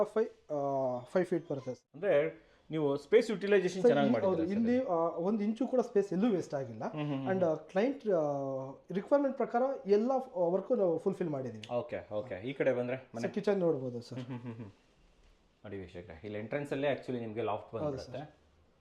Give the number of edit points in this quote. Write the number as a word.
one